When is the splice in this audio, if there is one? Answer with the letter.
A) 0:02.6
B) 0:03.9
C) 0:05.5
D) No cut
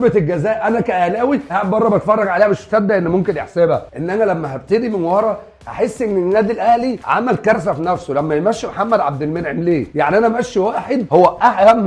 B